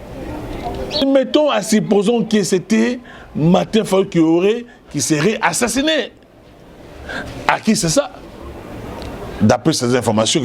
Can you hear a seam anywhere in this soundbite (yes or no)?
yes